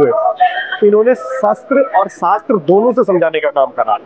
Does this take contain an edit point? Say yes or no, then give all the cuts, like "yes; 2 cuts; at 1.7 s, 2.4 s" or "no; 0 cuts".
no; 0 cuts